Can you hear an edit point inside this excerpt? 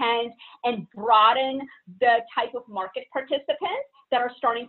no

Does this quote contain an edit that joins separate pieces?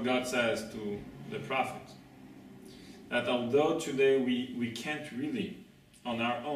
yes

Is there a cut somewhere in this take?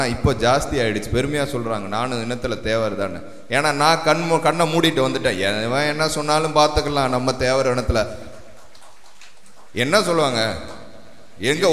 no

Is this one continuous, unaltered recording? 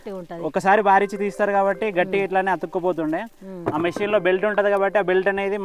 yes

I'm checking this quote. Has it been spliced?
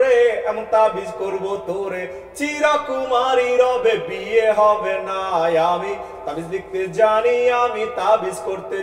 no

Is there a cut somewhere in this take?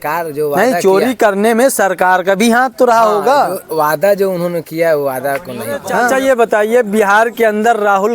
yes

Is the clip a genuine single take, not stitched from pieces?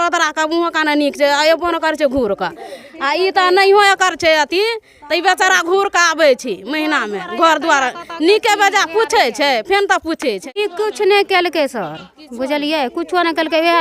no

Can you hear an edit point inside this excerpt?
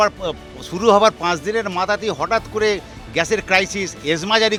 no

